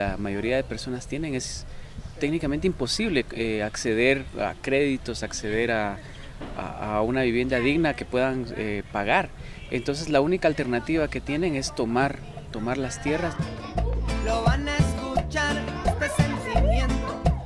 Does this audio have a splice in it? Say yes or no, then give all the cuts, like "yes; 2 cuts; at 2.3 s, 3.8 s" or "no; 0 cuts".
no; 0 cuts